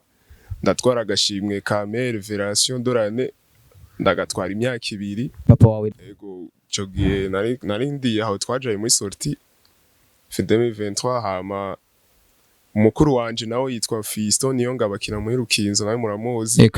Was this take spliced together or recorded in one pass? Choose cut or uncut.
cut